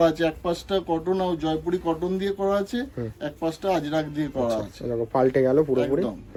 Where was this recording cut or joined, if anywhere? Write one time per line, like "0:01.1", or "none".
none